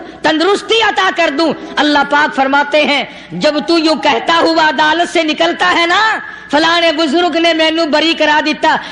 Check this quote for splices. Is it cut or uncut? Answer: uncut